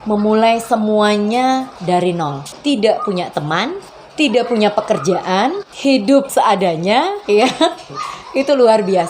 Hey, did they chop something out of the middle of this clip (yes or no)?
yes